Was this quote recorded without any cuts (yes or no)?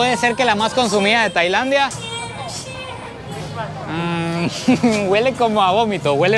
yes